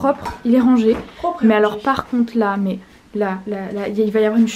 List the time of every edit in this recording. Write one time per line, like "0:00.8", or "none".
none